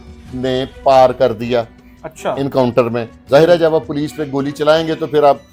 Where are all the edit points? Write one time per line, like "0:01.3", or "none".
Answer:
none